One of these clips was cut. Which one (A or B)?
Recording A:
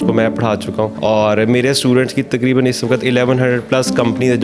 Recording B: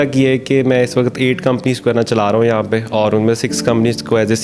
A